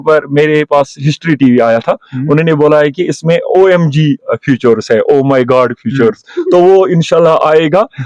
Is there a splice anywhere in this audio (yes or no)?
no